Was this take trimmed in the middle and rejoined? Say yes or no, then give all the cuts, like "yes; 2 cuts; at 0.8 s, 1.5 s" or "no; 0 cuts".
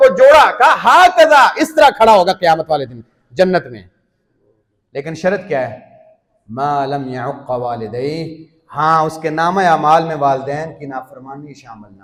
no; 0 cuts